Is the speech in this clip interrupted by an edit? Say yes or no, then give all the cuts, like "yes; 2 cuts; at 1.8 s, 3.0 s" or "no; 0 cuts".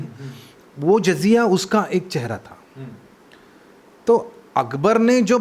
no; 0 cuts